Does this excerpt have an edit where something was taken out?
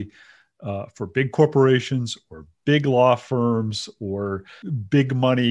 yes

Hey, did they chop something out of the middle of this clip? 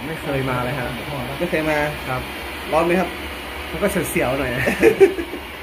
no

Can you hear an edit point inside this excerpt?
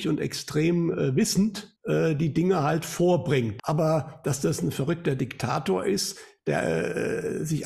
yes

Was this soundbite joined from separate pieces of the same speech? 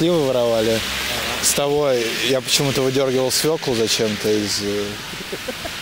no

